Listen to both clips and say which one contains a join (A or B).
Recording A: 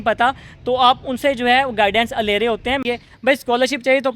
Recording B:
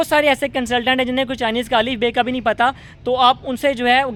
A